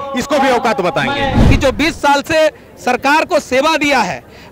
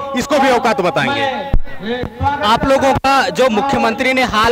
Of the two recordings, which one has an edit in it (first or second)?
first